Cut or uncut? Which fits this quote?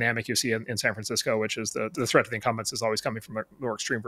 cut